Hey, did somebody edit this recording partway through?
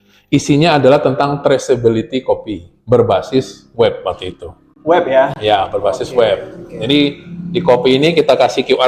no; 0 cuts

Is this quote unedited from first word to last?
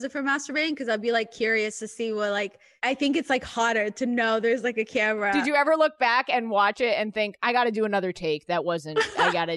no; 2 cuts; at 2.6 s, 5.3 s

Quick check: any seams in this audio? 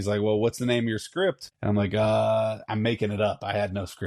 yes; 1 cut; at 1.5 s

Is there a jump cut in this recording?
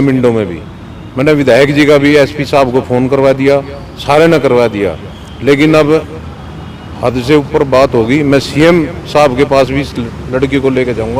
no; 0 cuts

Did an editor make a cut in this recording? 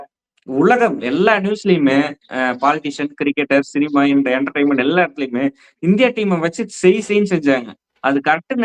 no; 0 cuts

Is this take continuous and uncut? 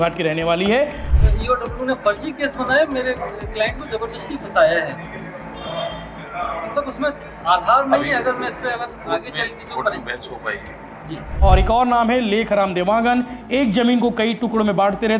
no; 2 cuts; at 1.0 s, 11.3 s

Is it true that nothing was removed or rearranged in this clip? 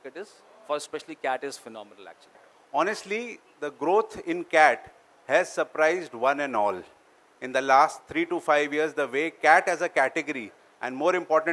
no; 1 cut; at 2.5 s

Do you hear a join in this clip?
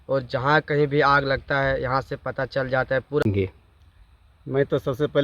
yes; 1 cut; at 3.2 s

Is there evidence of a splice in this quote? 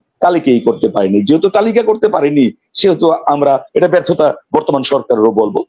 no; 0 cuts

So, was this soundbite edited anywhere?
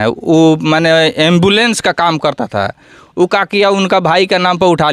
no; 0 cuts

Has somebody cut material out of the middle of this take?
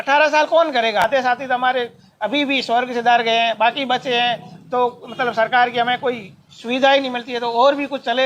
yes; 1 cut; at 1.0 s

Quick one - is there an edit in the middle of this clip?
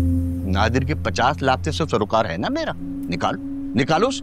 yes; 1 cut; at 2.9 s

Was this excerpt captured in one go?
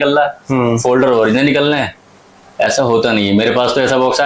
yes; 0 cuts

